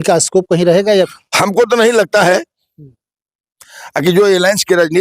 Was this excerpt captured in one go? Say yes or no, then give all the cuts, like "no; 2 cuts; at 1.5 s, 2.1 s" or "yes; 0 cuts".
no; 1 cut; at 1.1 s